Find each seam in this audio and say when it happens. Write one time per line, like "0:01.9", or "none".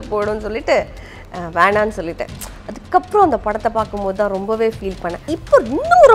0:05.2